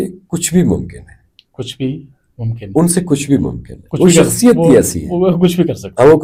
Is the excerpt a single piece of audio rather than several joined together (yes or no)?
yes